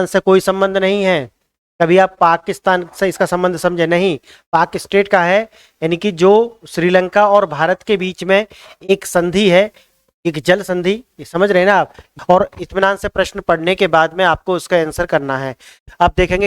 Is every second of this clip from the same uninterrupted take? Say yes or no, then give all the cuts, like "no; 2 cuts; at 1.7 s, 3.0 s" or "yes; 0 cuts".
no; 1 cut; at 12.1 s